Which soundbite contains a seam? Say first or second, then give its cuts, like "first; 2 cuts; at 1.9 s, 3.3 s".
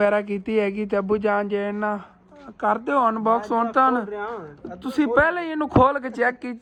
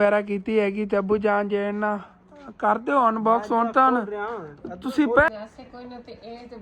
second; 1 cut; at 5.3 s